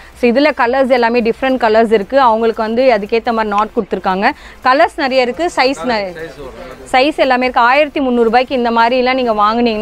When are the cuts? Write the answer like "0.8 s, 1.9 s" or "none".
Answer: none